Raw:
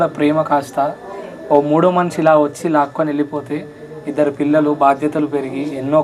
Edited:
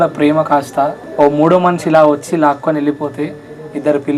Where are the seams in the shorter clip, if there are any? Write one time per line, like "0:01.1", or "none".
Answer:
0:01.0

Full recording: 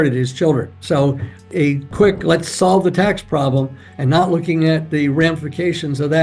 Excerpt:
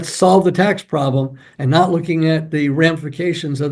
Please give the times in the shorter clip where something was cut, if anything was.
none

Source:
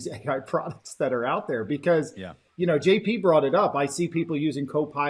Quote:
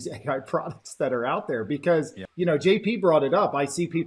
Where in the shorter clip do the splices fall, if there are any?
0:02.2

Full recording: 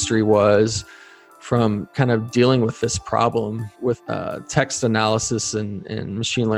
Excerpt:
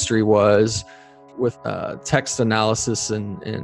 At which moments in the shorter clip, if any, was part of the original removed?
0:01.2

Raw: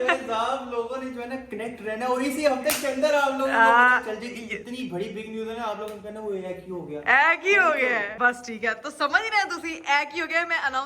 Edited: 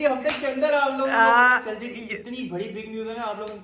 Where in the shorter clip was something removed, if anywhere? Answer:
none

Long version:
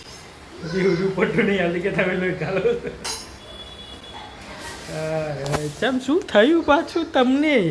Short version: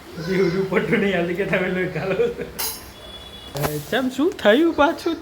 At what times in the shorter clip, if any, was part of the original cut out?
0:03.5

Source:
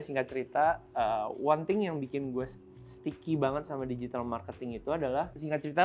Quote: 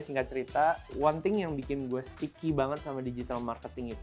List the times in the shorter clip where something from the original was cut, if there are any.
0:00.9
0:02.2

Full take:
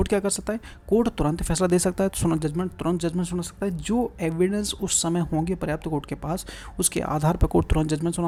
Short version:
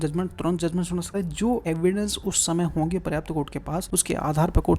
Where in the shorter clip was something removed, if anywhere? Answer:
0:01.5
0:03.9

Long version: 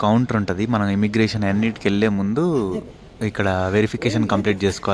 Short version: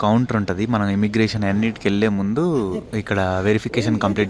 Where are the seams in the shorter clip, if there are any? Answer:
0:02.9

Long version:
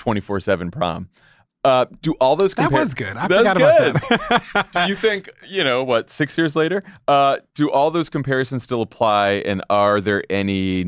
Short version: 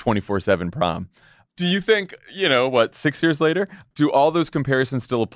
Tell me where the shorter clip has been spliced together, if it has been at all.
0:01.5
0:03.8

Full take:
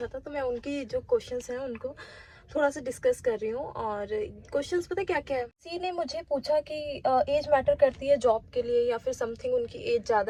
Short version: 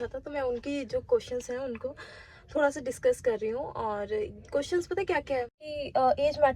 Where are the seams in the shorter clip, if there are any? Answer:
0:05.7

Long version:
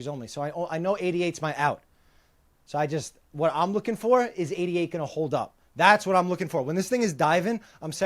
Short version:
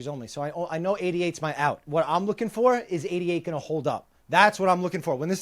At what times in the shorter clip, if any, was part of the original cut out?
0:01.8

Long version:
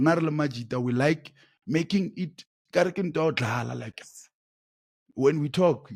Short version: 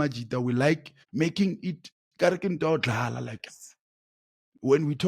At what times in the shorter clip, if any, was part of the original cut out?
0:01.0

